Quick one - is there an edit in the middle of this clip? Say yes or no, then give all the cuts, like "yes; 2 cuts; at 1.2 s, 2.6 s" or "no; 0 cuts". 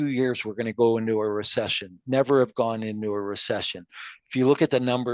no; 0 cuts